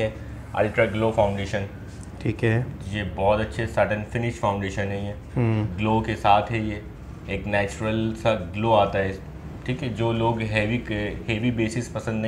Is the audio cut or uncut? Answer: uncut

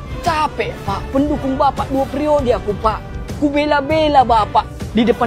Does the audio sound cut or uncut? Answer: uncut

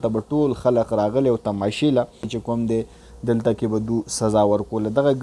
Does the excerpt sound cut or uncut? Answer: cut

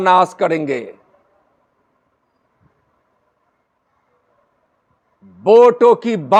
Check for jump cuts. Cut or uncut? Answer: uncut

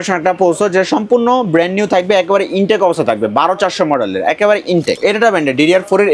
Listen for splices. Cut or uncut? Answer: cut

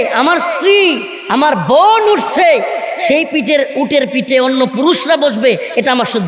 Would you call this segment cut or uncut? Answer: uncut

